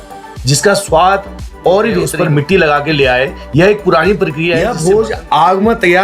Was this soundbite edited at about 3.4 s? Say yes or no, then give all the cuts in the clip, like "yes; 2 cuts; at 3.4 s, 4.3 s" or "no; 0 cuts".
no; 2 cuts; at 2.1 s, 4.7 s